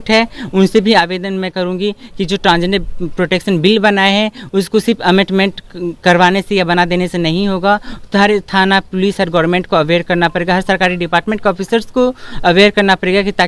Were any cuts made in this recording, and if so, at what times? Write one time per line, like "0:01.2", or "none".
none